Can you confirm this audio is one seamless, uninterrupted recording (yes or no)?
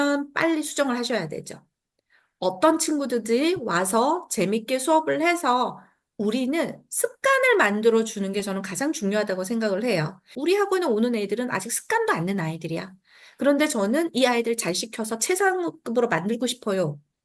no